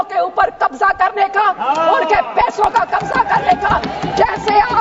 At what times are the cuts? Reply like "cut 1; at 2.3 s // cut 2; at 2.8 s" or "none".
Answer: none

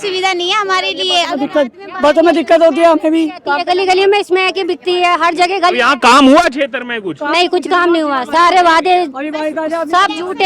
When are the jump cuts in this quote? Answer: none

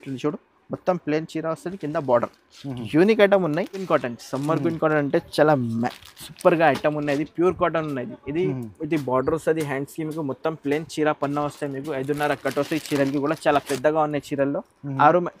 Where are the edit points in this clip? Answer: cut 1; at 3.8 s

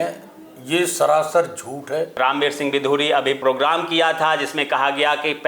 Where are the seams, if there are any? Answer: cut 1; at 2.1 s // cut 2; at 3.4 s

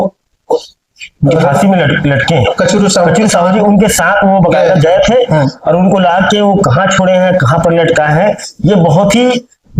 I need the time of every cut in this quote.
none

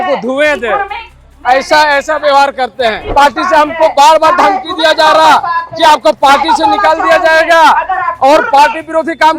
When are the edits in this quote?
cut 1; at 3.1 s

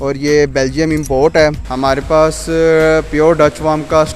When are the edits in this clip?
cut 1; at 1.7 s

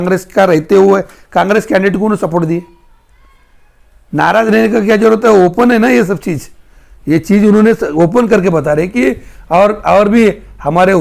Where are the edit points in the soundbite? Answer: none

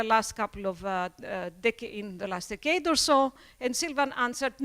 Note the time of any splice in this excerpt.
none

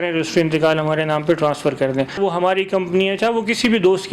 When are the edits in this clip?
cut 1; at 2.2 s

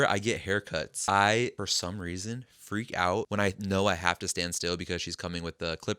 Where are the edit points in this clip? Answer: cut 1; at 0.9 s // cut 2; at 1.5 s // cut 3; at 3.3 s

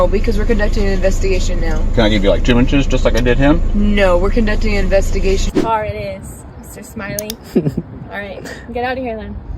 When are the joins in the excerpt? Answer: cut 1; at 5.5 s

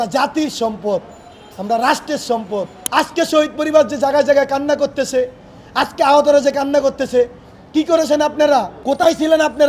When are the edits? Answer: cut 1; at 2.8 s // cut 2; at 8.7 s

